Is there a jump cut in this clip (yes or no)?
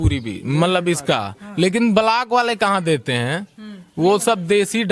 no